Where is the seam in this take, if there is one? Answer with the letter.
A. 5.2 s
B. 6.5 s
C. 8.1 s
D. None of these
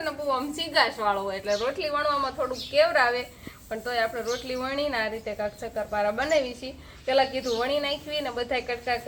D